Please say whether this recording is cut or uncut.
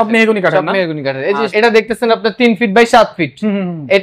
cut